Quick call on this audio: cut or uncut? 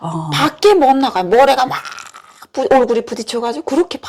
uncut